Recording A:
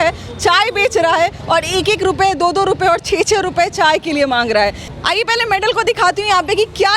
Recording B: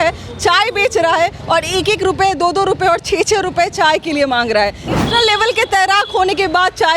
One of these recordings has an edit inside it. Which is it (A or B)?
B